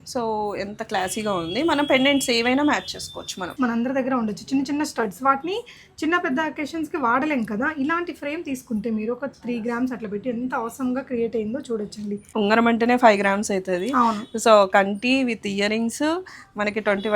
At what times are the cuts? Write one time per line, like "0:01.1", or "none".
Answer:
0:03.5
0:12.2